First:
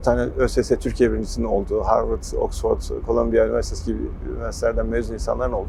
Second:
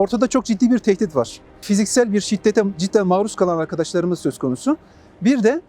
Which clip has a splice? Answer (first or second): second